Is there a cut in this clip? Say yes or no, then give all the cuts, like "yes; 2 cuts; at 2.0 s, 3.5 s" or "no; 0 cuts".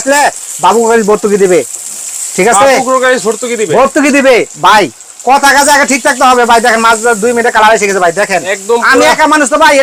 no; 0 cuts